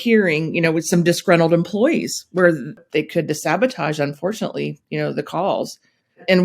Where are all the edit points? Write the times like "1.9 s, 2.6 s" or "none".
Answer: 2.7 s